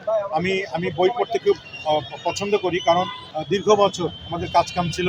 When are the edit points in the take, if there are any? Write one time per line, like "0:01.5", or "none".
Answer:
0:03.2

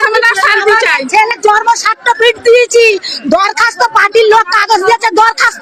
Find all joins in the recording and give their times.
none

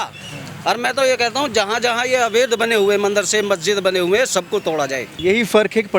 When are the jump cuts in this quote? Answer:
0:05.1

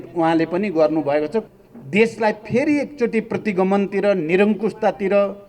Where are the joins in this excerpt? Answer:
0:01.5

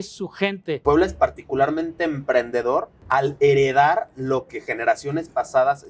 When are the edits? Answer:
0:00.8
0:03.0

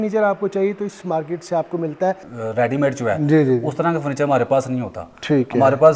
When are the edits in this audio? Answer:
0:02.3

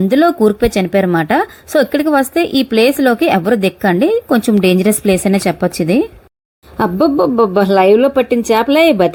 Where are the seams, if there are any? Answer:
none

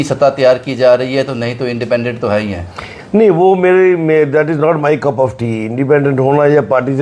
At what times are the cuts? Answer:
none

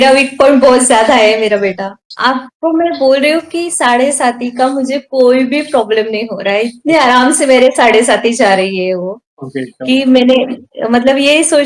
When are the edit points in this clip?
0:02.0

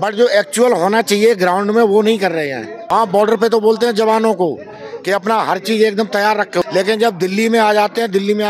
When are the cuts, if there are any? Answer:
0:02.9
0:06.6

